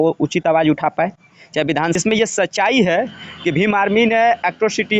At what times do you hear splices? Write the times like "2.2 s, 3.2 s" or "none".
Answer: 2.0 s